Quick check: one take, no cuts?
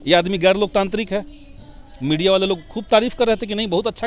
yes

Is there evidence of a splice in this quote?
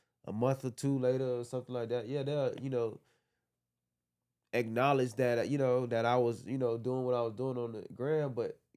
no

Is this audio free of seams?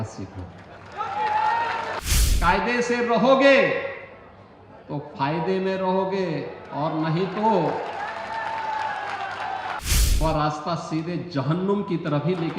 no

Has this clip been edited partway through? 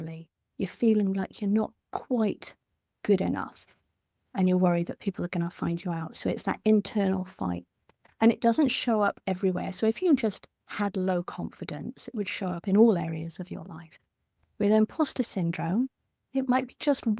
no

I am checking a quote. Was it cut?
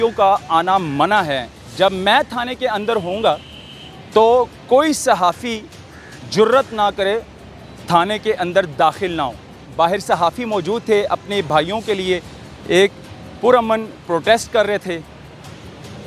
yes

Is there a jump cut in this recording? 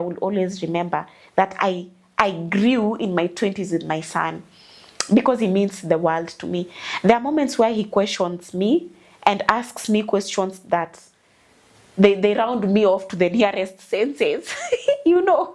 no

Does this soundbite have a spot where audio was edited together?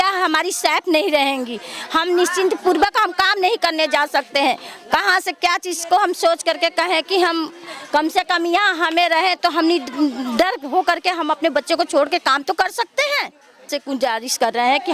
yes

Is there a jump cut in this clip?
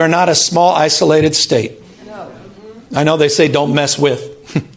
no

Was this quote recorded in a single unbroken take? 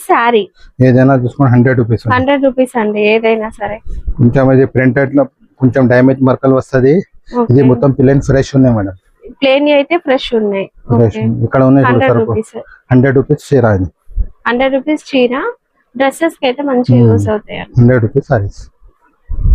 yes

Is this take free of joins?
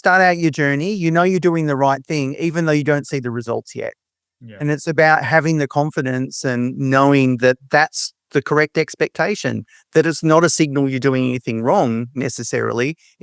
yes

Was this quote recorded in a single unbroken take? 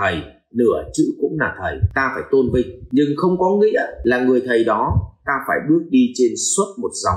no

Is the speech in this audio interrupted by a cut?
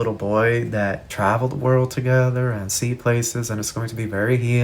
yes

